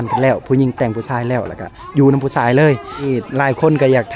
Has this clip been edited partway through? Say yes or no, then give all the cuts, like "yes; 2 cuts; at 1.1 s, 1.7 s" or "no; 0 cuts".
yes; 1 cut; at 3.1 s